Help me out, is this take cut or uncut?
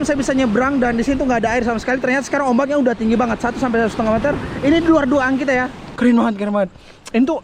cut